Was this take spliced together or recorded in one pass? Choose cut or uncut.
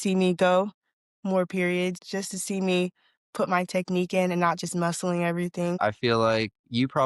cut